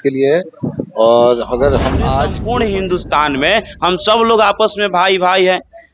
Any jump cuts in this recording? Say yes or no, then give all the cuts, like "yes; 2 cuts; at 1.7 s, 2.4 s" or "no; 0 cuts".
yes; 1 cut; at 2.3 s